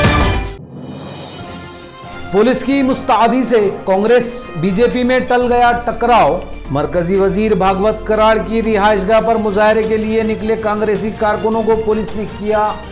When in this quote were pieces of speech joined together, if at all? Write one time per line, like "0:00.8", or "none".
0:00.8
0:01.4